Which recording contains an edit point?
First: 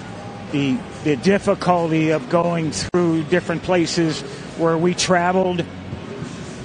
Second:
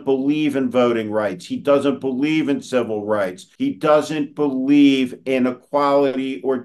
second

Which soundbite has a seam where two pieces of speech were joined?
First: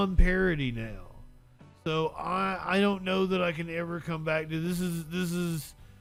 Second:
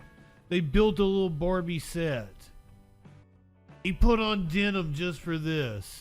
second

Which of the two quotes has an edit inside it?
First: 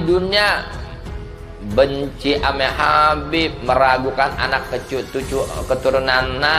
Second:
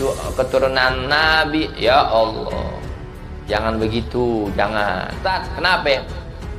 second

